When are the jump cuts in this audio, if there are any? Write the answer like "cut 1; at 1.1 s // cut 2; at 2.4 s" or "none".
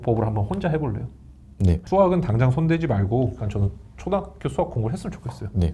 cut 1; at 1.8 s // cut 2; at 3.5 s